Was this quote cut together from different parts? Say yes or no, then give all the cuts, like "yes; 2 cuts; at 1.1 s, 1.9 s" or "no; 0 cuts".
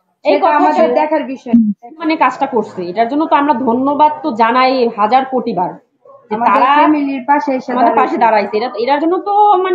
yes; 1 cut; at 2.1 s